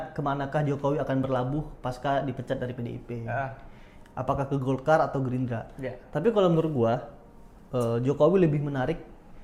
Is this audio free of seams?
yes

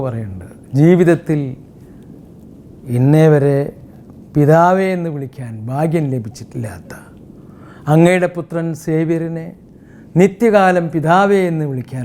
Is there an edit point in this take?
no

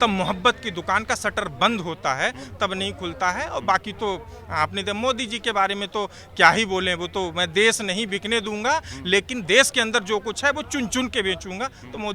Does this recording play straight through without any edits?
yes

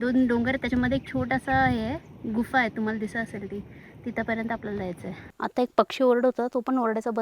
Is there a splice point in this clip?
yes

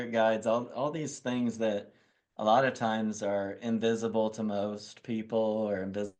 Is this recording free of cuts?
yes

